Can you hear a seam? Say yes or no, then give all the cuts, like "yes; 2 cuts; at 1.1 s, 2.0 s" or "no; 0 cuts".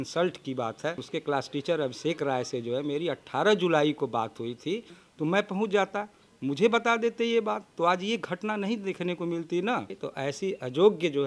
yes; 3 cuts; at 1.1 s, 5.0 s, 9.9 s